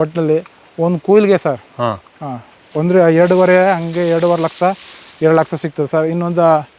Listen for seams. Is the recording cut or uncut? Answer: uncut